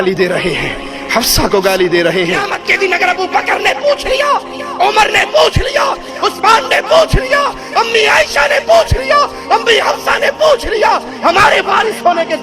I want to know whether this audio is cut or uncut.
cut